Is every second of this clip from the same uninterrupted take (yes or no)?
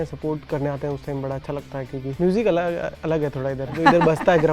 no